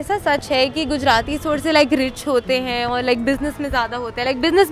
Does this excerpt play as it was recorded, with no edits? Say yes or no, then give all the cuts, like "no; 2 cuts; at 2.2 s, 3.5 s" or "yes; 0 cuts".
yes; 0 cuts